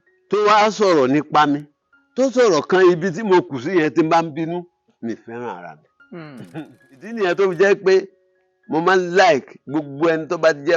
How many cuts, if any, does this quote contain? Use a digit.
1